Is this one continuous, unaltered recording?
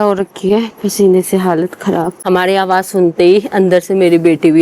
yes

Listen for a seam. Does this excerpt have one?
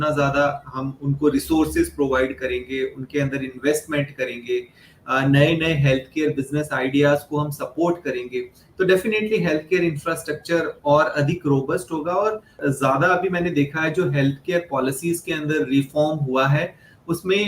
yes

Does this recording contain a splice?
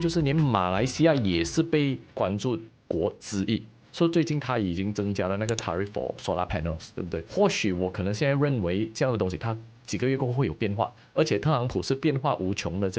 yes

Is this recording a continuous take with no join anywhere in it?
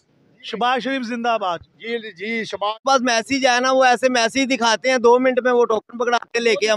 no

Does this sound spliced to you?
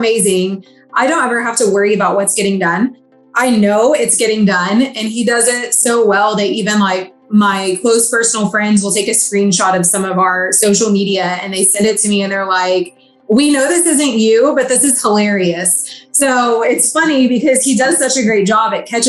no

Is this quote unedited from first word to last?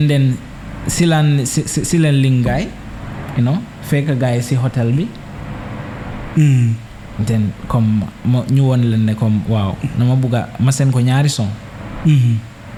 yes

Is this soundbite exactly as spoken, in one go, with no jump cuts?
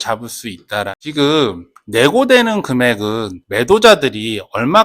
no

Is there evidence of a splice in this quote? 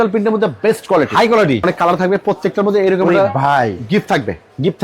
yes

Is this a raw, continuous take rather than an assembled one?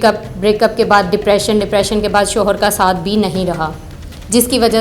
yes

